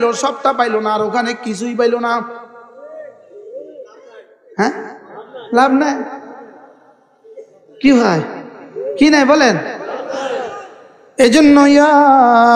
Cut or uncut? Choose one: uncut